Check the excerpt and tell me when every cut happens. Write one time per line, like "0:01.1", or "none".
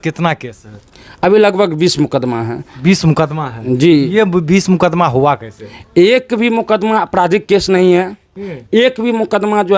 none